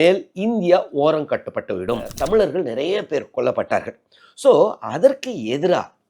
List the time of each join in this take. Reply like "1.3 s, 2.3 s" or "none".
2.2 s